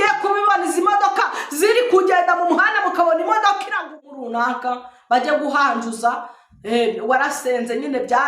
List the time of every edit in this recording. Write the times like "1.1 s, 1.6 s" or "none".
3.8 s